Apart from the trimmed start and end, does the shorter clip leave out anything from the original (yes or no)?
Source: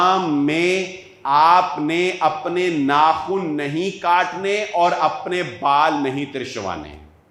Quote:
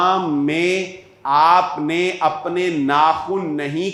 no